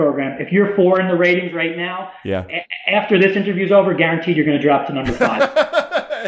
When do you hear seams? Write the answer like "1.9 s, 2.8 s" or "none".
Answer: 5.2 s